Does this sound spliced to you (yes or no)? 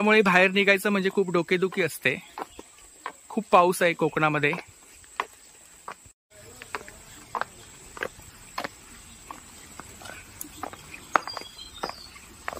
no